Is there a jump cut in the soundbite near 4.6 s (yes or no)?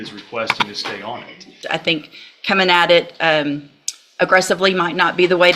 no